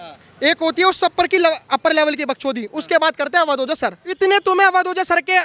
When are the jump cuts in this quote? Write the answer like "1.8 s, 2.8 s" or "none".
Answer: 4.1 s

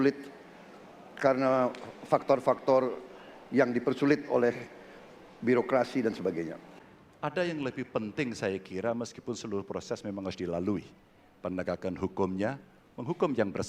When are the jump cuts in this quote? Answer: 6.9 s

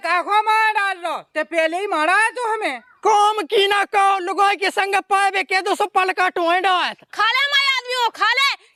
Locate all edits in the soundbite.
none

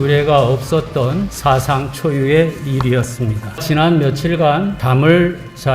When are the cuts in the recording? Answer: 3.6 s, 4.8 s

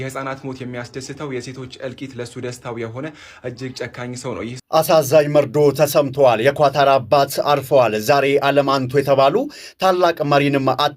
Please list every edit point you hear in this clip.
4.6 s

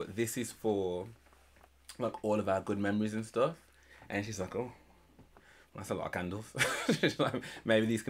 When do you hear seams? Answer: none

